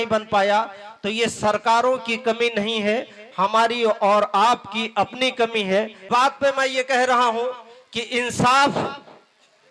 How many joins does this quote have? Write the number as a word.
one